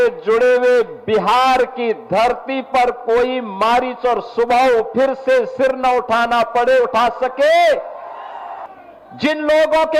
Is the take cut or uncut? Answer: cut